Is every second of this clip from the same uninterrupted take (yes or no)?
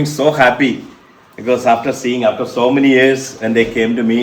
yes